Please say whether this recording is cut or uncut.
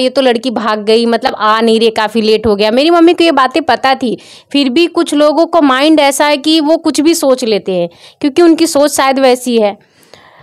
uncut